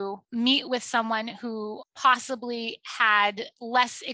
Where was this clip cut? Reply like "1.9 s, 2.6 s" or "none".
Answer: none